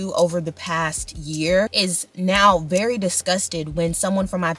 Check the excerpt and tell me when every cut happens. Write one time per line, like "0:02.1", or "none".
0:01.7